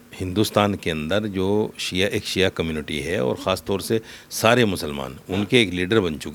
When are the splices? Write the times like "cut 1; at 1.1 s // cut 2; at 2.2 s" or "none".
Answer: none